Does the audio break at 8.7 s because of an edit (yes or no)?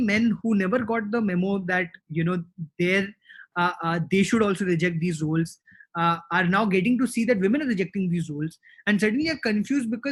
no